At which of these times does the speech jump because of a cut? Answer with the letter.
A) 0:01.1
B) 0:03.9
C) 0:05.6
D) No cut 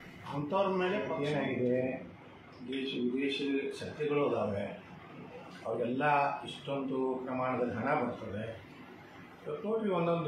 A